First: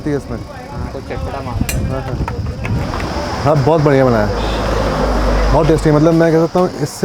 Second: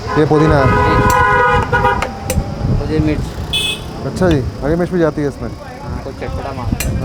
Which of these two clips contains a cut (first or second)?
first